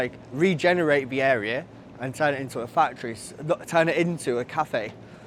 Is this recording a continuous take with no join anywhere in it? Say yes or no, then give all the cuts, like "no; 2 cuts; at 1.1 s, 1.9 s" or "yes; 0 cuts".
yes; 0 cuts